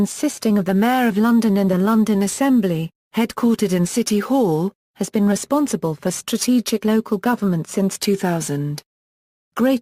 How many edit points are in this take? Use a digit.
1